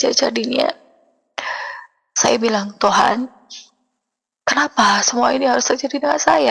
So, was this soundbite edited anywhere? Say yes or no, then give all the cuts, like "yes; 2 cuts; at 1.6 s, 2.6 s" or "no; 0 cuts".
no; 0 cuts